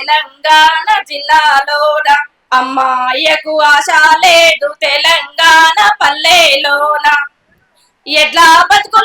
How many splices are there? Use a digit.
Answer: 1